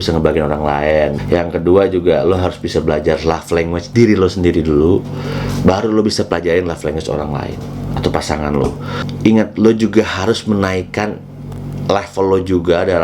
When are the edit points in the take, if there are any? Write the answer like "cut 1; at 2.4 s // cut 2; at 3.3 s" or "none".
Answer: none